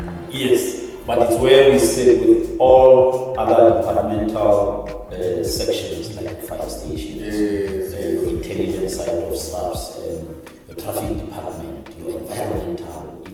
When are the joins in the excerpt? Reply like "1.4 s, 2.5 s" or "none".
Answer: none

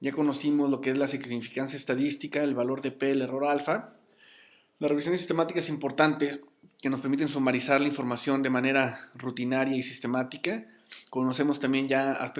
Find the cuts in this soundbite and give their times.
8.5 s

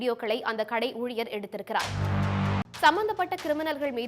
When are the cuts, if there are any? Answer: 2.6 s

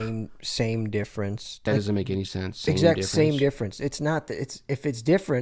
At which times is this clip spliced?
1.6 s

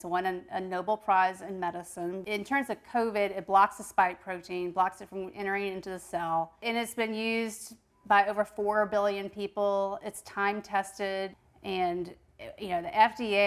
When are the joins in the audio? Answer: 2.2 s, 6.6 s, 11.4 s

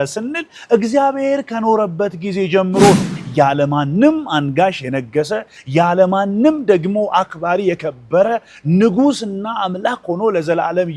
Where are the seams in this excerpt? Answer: 3.2 s

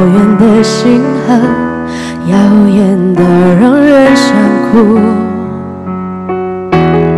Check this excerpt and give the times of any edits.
none

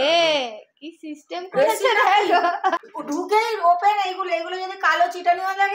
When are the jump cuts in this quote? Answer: 2.9 s

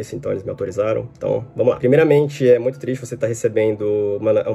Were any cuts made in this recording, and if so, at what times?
none

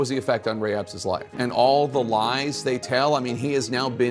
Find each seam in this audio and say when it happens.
1.3 s

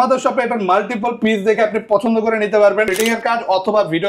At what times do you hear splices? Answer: 2.9 s

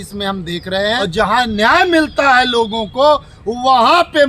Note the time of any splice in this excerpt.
1.0 s

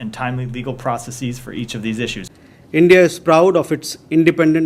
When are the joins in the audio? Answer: 2.3 s

